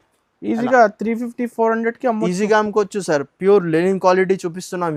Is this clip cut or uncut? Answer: uncut